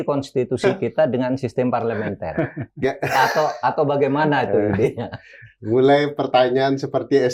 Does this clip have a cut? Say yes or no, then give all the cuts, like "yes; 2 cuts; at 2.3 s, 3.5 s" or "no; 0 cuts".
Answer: no; 0 cuts